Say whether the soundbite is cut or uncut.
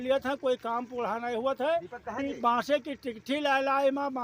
uncut